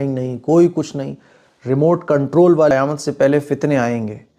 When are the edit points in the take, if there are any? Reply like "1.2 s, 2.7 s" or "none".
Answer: 2.7 s